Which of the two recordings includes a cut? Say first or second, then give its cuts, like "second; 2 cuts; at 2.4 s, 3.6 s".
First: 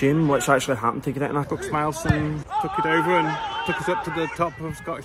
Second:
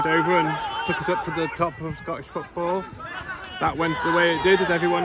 first; 1 cut; at 1.5 s